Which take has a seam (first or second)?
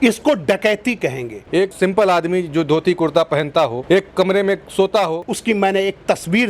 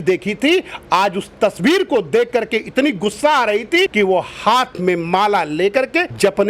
first